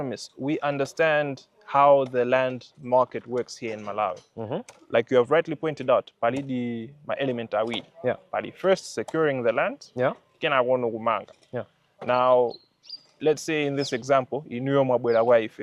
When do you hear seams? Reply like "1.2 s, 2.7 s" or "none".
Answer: none